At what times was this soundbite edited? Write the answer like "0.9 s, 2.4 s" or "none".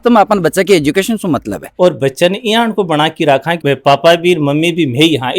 1.6 s, 3.6 s